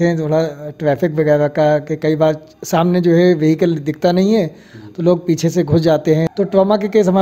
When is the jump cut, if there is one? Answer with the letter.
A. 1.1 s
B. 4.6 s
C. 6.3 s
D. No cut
C